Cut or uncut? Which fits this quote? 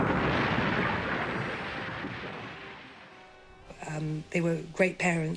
cut